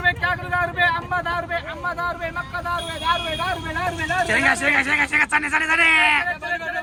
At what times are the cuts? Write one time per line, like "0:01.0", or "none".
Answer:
none